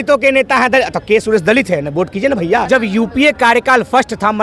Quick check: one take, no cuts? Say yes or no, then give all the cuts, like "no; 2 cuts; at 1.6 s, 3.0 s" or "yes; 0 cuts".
no; 1 cut; at 2.6 s